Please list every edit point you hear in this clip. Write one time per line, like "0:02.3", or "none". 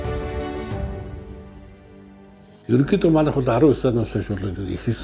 0:02.8